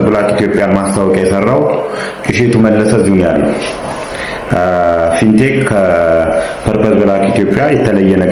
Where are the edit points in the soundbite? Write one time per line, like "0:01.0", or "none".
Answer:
none